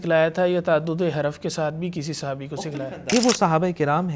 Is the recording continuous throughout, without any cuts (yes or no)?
no